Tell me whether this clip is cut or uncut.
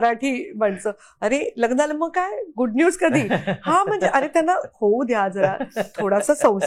uncut